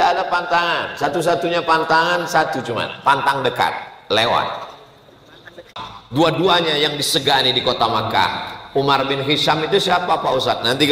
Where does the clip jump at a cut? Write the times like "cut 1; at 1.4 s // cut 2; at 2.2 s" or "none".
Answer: cut 1; at 5.8 s